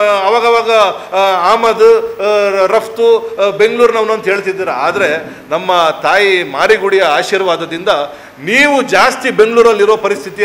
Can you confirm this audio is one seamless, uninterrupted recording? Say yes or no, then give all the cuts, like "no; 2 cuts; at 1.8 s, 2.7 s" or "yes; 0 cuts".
yes; 0 cuts